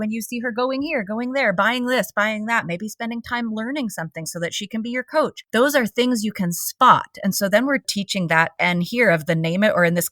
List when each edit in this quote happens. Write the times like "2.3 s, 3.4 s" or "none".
5.4 s, 7.9 s